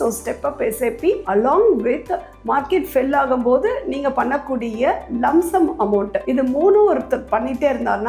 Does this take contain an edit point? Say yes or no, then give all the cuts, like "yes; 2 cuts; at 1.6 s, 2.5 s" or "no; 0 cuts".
yes; 1 cut; at 1.2 s